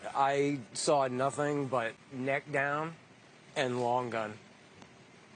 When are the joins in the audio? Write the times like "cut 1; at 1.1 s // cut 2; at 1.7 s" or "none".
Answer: none